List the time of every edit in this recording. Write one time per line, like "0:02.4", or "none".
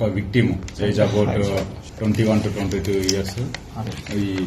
0:01.8